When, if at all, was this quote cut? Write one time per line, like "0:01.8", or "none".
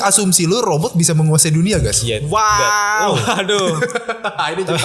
none